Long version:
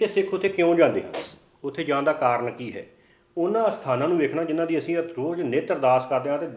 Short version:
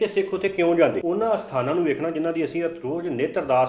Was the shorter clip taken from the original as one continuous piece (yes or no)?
no